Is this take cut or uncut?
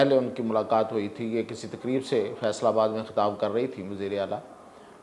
uncut